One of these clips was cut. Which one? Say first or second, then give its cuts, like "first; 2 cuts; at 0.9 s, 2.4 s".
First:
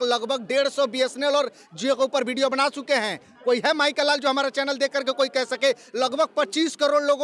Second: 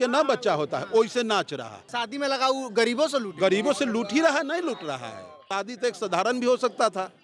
second; 2 cuts; at 1.9 s, 5.6 s